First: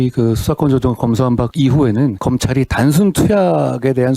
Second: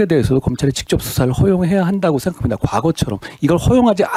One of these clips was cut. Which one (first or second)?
first